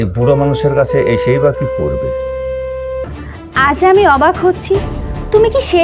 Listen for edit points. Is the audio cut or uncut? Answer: cut